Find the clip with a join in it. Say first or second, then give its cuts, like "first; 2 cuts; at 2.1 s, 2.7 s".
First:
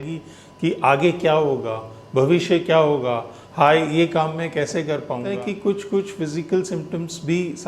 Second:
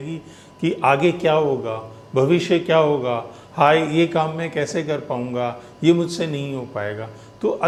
first; 1 cut; at 5.3 s